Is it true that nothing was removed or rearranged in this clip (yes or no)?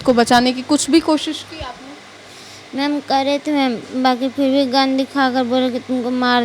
yes